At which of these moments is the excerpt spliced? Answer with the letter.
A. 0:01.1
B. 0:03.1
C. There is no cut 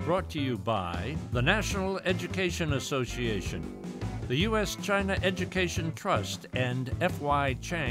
A